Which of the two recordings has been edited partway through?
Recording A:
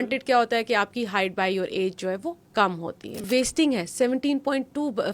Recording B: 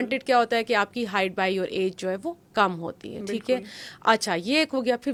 A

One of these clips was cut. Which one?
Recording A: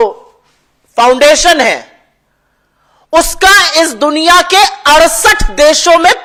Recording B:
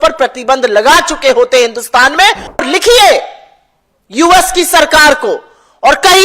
B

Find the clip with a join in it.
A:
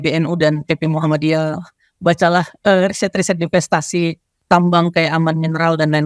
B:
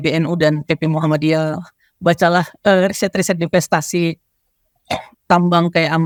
A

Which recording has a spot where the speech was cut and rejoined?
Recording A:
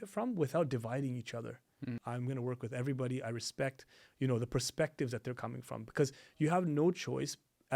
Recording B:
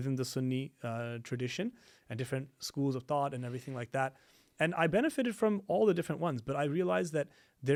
A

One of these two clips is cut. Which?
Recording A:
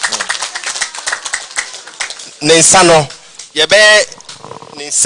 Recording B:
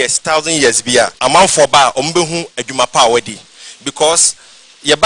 B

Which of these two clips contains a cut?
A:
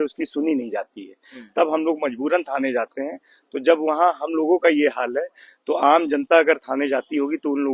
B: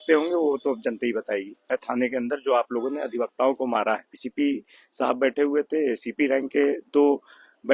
B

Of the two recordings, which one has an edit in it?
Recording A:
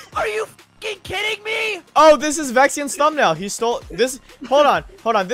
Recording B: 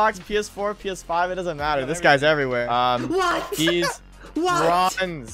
B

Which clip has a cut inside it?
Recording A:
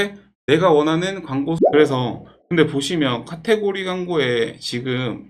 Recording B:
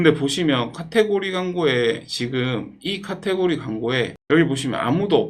A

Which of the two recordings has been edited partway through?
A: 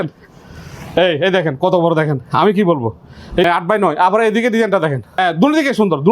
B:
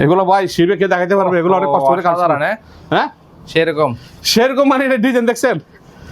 A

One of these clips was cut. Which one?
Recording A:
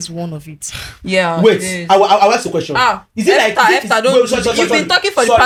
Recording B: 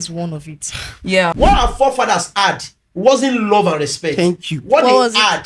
B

